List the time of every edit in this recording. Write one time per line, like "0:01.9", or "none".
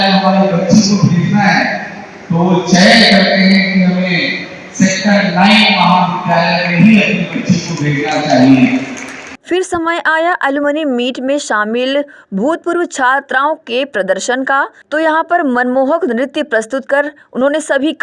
none